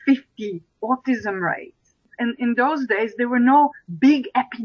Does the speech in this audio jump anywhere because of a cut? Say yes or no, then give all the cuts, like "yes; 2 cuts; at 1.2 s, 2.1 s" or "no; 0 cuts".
yes; 1 cut; at 2.1 s